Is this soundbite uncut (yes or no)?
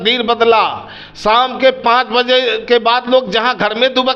yes